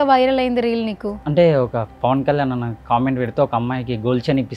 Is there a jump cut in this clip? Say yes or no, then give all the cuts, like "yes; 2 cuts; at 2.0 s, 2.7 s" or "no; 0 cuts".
yes; 1 cut; at 1.1 s